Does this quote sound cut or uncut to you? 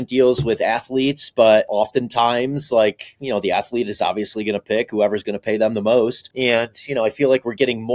cut